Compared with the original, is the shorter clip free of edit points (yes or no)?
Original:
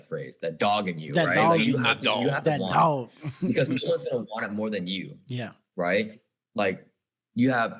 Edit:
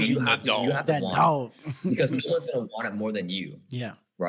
yes